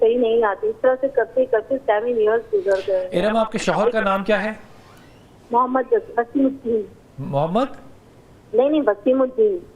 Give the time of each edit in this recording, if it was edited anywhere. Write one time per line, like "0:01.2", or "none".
none

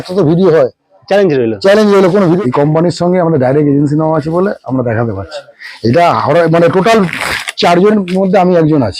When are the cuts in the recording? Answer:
0:02.4

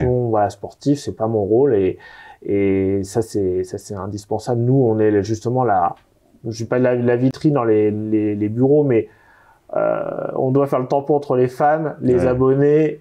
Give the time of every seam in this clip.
none

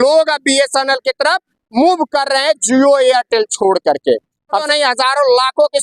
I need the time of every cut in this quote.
0:04.6

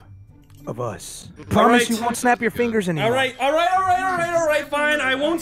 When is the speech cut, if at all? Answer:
0:01.3

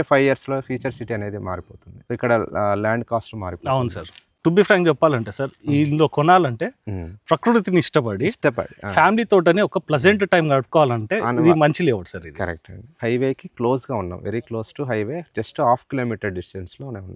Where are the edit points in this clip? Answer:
0:04.3
0:12.9

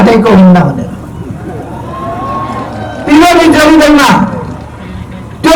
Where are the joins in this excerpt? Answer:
none

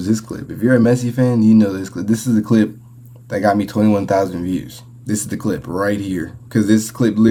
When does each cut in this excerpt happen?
none

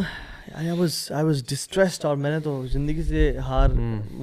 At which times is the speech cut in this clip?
none

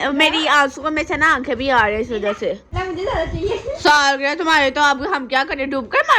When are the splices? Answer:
0:02.7

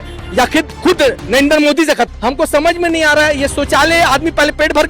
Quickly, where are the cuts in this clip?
0:02.1

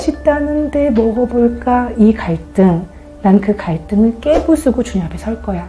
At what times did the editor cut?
none

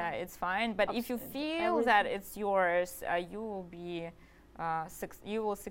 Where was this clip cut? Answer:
none

